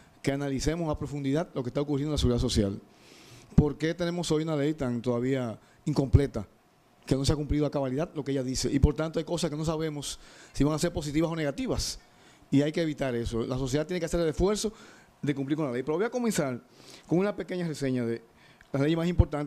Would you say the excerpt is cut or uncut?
cut